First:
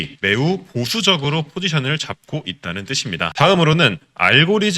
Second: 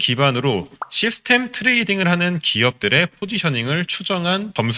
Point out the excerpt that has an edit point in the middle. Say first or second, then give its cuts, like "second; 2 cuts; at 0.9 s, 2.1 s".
first; 1 cut; at 3.3 s